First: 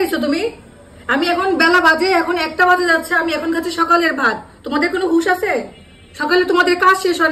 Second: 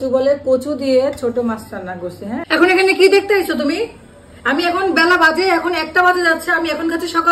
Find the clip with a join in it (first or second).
second